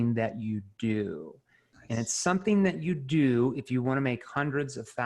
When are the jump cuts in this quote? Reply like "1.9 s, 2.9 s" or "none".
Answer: none